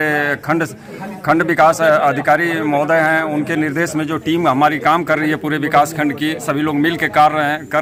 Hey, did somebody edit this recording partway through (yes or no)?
no